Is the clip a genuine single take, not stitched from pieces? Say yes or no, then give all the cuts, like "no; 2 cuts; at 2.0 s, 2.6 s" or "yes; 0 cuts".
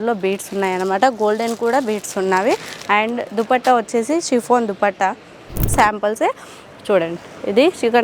no; 1 cut; at 5.7 s